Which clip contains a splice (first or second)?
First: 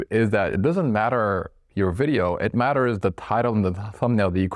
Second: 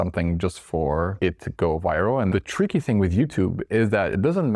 second